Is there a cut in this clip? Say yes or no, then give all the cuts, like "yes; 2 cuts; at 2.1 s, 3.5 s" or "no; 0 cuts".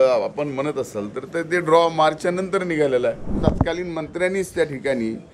yes; 1 cut; at 3.3 s